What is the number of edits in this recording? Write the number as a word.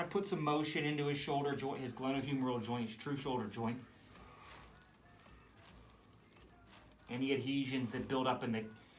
zero